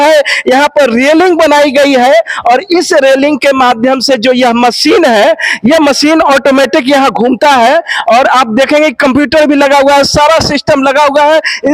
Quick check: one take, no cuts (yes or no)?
yes